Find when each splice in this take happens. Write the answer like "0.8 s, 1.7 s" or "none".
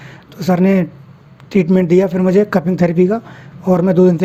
none